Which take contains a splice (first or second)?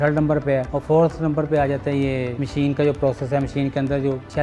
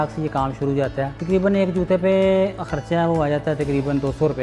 second